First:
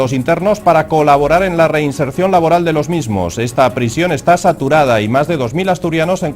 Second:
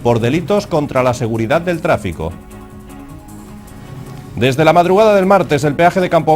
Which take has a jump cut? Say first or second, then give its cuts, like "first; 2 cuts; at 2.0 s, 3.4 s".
first; 1 cut; at 2.1 s